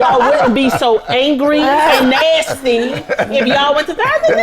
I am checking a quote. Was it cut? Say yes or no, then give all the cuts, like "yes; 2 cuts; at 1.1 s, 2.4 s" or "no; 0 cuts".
yes; 1 cut; at 1.9 s